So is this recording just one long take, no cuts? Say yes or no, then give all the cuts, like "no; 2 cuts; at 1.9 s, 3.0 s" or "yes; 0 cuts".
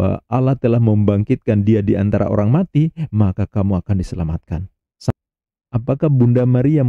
no; 1 cut; at 5.1 s